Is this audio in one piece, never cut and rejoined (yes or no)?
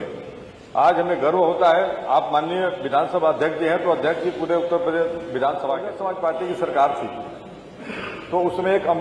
no